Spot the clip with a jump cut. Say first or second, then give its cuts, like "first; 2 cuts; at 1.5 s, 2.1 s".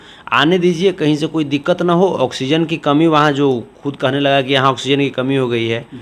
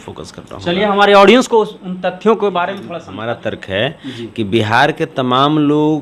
second; 1 cut; at 3.1 s